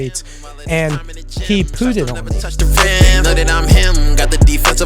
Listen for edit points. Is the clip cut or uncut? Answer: cut